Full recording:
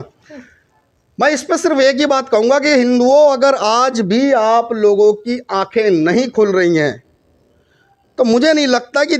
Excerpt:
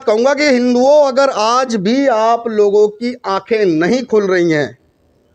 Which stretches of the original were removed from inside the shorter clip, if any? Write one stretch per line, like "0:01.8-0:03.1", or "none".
none